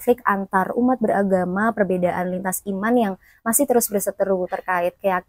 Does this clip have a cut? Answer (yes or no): no